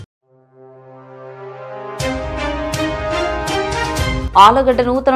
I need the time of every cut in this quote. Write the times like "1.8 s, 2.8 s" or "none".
4.1 s